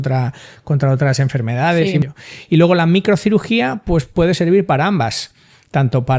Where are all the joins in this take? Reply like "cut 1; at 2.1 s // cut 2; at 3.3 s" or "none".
cut 1; at 2.0 s

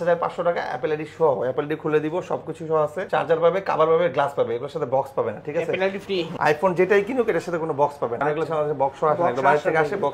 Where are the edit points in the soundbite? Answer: none

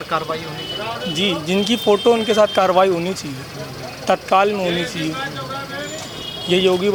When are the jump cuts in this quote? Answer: none

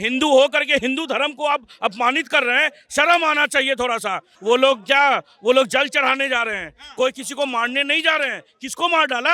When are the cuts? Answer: cut 1; at 4.3 s

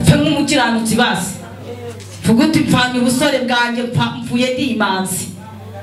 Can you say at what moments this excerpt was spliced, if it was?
none

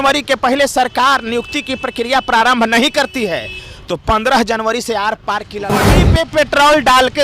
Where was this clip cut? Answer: cut 1; at 6.0 s

